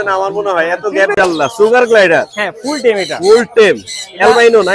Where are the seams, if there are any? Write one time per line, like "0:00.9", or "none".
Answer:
0:01.1